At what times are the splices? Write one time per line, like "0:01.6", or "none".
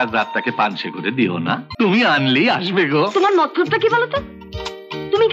0:01.7